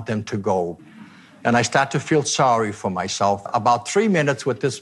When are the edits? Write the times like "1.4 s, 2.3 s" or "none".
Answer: 0.8 s, 3.4 s